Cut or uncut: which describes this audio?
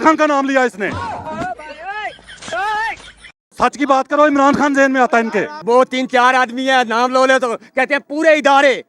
cut